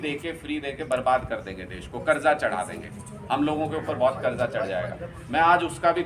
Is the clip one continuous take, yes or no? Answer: yes